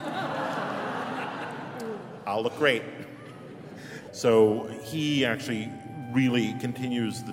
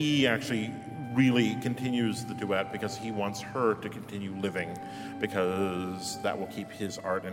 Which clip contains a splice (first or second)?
first